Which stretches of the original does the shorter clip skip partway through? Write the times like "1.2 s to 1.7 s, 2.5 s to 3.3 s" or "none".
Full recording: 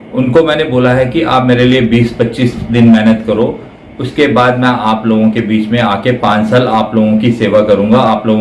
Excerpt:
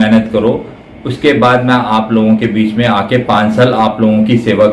none